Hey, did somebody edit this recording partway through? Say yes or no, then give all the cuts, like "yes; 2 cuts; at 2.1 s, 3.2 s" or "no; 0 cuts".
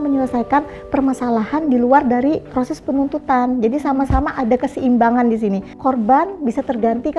yes; 2 cuts; at 2.5 s, 5.7 s